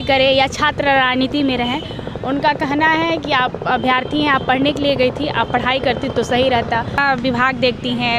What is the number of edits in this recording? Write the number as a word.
one